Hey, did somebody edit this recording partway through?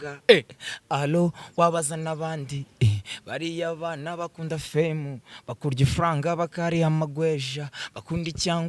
no; 0 cuts

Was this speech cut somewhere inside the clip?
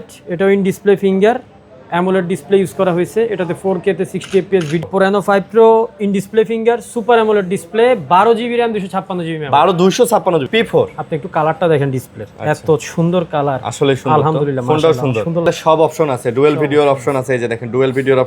yes; 3 cuts; at 4.8 s, 10.5 s, 15.5 s

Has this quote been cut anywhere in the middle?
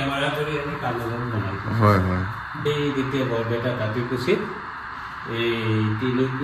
yes; 1 cut; at 2.6 s

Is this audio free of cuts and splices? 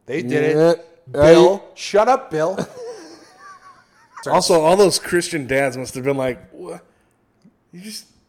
no; 1 cut; at 4.1 s

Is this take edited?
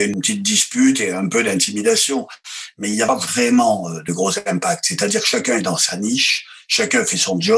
no; 0 cuts

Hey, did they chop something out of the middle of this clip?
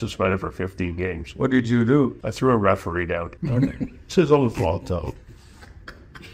yes; 2 cuts; at 2.2 s, 3.3 s

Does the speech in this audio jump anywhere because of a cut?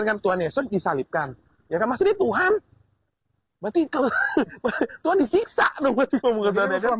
no; 0 cuts

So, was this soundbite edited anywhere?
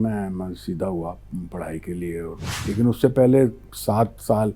yes; 1 cut; at 2.5 s

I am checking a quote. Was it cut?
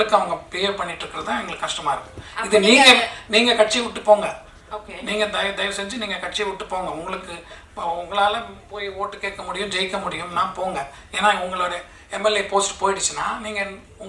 no; 0 cuts

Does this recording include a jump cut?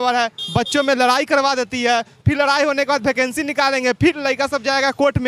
no; 0 cuts

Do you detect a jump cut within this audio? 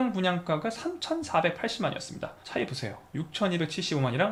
no; 0 cuts

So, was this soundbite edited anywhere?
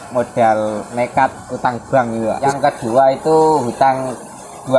yes; 1 cut; at 2.4 s

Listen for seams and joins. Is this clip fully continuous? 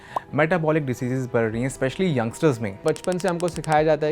no; 1 cut; at 2.8 s

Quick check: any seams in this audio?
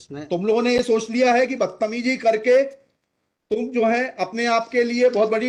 no; 0 cuts

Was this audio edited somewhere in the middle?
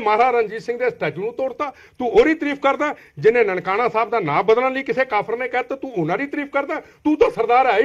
no; 0 cuts

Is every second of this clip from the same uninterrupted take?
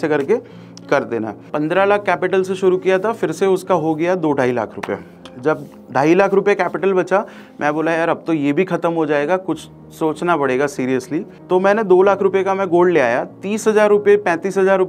no; 1 cut; at 1.4 s

